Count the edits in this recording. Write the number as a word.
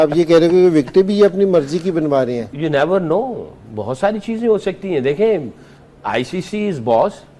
zero